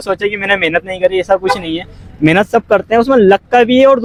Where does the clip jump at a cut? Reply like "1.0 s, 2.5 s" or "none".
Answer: none